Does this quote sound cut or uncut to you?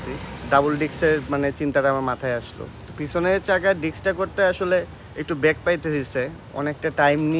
uncut